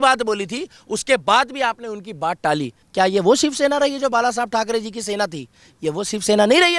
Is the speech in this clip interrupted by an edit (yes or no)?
yes